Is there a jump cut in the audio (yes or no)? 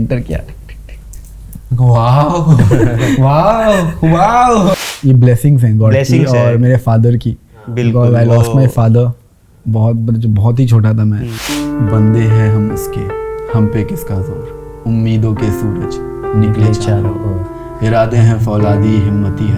yes